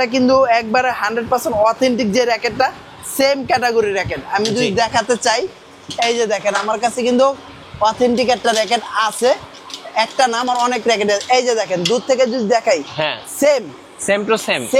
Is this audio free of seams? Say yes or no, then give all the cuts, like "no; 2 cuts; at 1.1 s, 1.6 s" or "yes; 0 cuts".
yes; 0 cuts